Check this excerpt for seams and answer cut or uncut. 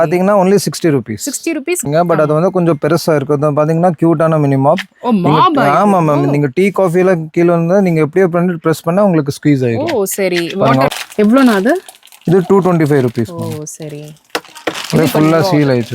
cut